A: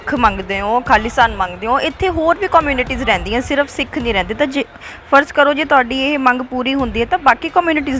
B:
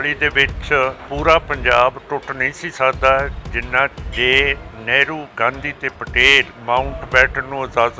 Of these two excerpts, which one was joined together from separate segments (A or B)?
B